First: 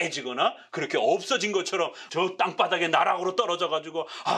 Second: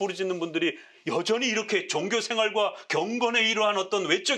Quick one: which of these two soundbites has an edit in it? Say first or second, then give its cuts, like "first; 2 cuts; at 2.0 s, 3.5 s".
first; 1 cut; at 2.0 s